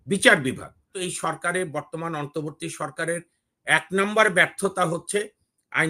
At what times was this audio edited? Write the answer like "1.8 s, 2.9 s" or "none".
1.0 s